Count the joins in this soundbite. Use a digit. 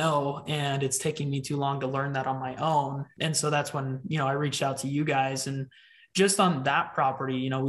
1